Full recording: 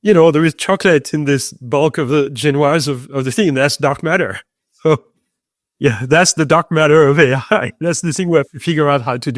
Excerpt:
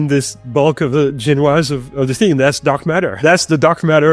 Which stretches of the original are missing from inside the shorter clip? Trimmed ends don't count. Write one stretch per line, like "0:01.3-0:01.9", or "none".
0:04.3-0:06.0